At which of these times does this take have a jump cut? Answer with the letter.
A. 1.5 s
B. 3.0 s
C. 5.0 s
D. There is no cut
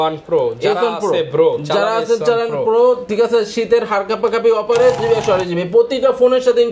C